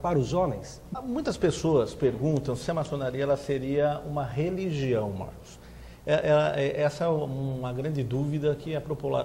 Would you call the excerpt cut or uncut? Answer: cut